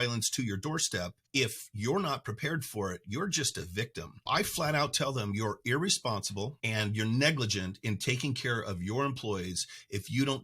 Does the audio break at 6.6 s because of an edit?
yes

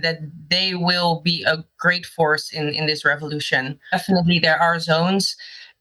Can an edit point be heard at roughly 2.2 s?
no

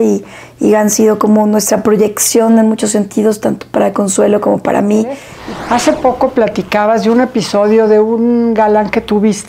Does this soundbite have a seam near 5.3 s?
yes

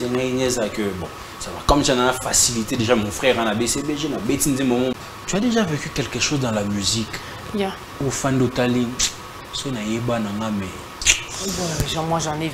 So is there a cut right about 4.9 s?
yes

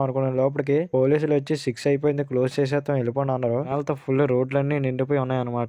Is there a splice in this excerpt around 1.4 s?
no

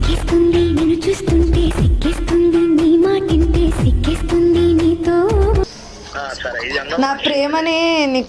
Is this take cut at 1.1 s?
no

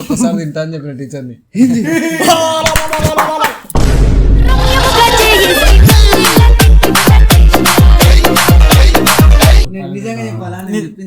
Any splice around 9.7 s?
yes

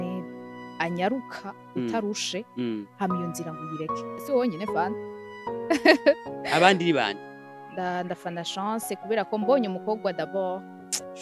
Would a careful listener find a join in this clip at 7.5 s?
no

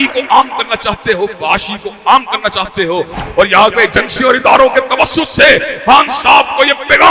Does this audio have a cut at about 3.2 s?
yes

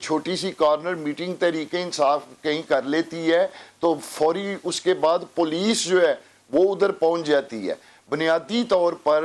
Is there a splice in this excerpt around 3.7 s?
no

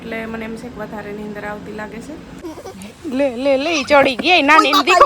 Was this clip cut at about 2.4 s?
yes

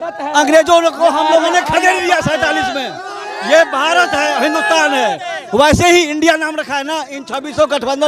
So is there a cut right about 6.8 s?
no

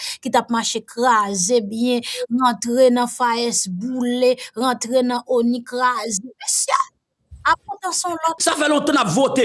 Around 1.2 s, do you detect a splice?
no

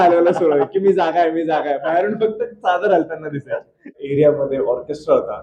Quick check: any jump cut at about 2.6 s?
no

